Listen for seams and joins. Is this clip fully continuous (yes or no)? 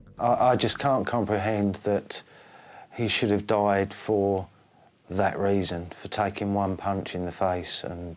yes